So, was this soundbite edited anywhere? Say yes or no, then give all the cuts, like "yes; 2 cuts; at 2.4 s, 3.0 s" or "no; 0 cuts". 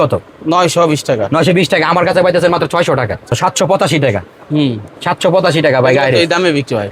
yes; 1 cut; at 3.3 s